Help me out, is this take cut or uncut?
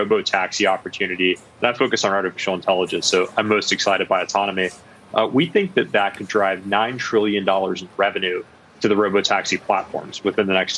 uncut